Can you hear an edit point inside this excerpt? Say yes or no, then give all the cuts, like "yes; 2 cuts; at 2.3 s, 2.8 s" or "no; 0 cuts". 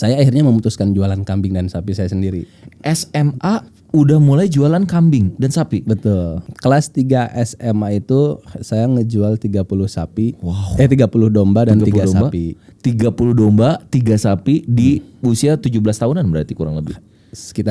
yes; 1 cut; at 6.4 s